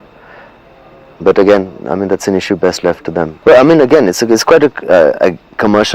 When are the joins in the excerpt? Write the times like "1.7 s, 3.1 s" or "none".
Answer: 3.3 s